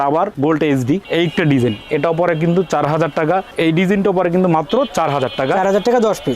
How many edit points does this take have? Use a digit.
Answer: 2